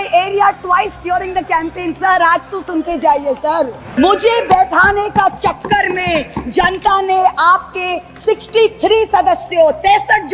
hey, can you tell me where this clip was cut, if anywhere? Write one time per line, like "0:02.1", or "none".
0:03.8

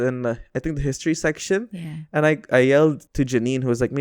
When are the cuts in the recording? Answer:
0:03.0

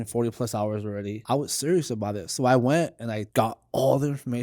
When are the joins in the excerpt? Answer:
0:01.2
0:03.2

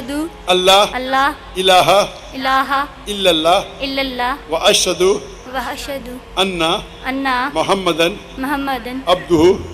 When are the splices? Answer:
0:01.0

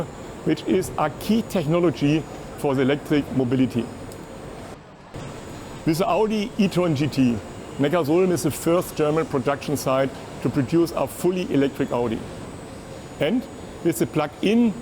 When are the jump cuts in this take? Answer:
0:05.2

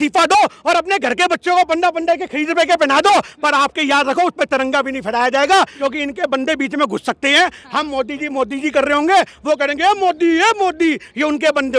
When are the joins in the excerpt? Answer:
0:05.7

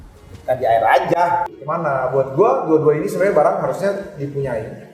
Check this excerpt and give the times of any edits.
0:01.5

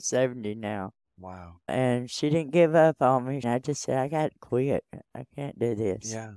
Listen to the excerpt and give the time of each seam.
0:03.4

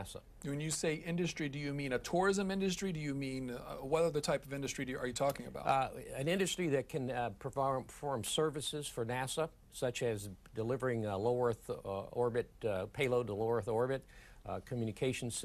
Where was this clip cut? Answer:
0:04.2

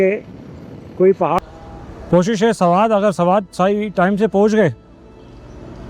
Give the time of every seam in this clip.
0:01.4

